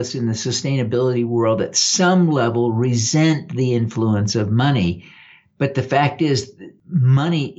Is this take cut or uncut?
uncut